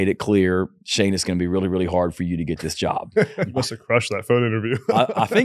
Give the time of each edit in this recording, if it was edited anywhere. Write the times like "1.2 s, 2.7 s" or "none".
3.5 s